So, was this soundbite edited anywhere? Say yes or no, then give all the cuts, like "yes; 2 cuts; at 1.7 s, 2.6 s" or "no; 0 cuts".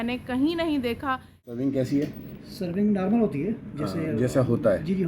yes; 1 cut; at 1.5 s